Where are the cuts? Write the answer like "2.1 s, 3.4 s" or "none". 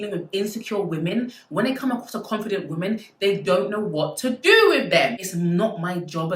5.1 s